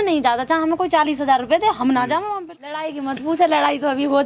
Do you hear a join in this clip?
yes; 1 cut; at 2.3 s

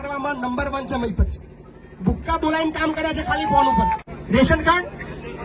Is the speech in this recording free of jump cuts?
no; 1 cut; at 4.1 s

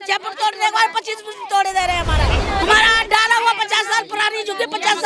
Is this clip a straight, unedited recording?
no; 1 cut; at 2.4 s

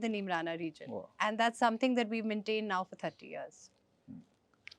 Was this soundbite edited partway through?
no; 0 cuts

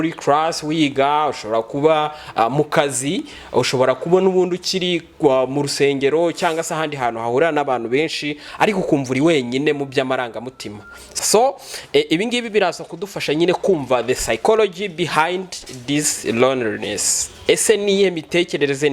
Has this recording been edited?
yes; 1 cut; at 11.1 s

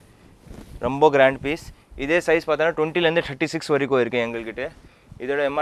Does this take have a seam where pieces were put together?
no; 0 cuts

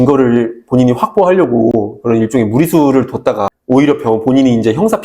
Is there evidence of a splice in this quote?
yes; 1 cut; at 3.5 s

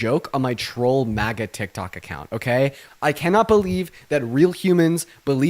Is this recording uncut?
no; 1 cut; at 2.9 s

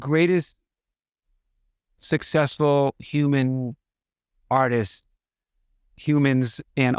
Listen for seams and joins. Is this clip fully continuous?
yes; 0 cuts

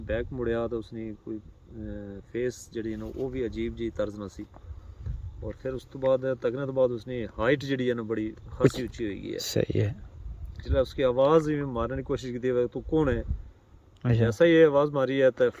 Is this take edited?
no; 0 cuts

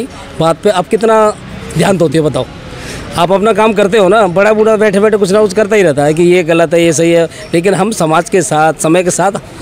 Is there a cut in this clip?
no; 0 cuts

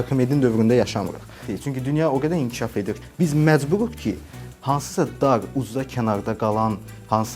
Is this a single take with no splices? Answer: no; 1 cut; at 1.5 s

